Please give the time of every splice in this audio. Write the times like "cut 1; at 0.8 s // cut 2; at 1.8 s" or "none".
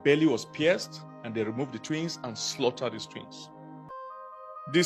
cut 1; at 3.9 s

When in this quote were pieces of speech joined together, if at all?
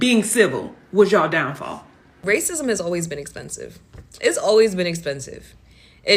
cut 1; at 2.1 s

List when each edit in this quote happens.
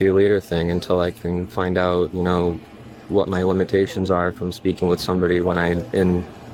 none

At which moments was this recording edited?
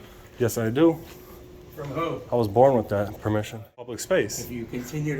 cut 1; at 4.0 s

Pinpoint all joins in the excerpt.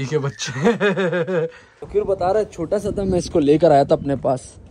cut 1; at 1.8 s

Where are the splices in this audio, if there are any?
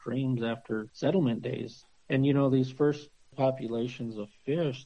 cut 1; at 0.9 s // cut 2; at 1.7 s // cut 3; at 3.3 s

